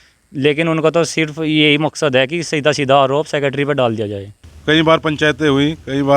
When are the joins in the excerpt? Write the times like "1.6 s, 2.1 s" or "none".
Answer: 4.5 s